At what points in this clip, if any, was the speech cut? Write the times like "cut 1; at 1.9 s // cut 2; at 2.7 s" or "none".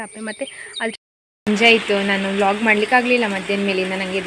cut 1; at 0.9 s